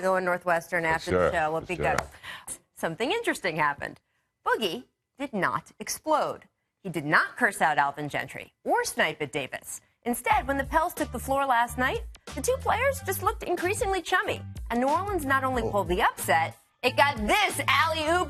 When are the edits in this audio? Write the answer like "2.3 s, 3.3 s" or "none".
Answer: none